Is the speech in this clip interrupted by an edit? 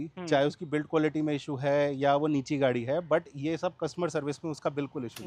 no; 0 cuts

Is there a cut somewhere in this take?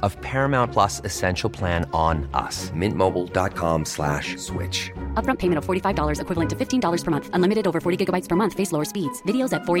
no; 0 cuts

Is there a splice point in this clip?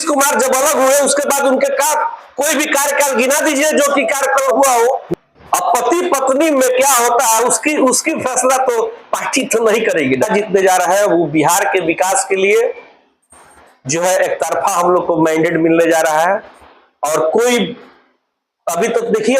yes; 2 cuts; at 5.0 s, 10.3 s

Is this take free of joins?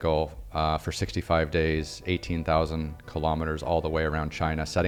yes; 0 cuts

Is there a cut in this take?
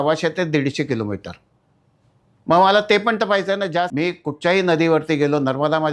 yes; 1 cut; at 3.9 s

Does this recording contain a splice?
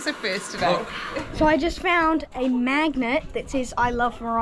yes; 1 cut; at 1.3 s

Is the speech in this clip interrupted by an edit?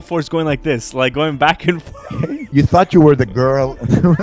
yes; 1 cut; at 2.5 s

